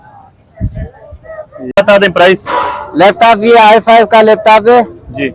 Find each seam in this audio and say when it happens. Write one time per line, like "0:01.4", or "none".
0:01.7